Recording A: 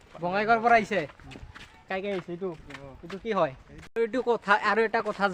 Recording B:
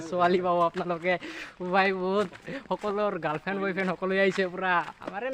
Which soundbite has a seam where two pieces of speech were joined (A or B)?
A